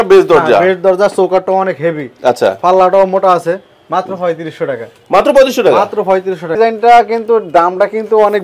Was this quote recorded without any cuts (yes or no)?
no